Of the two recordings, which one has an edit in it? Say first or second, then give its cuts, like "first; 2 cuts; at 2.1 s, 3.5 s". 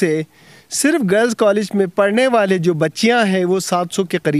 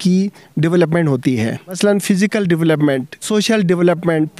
second; 2 cuts; at 1.8 s, 3.3 s